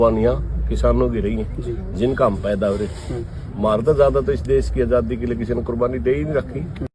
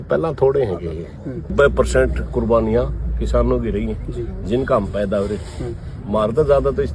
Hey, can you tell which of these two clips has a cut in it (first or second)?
second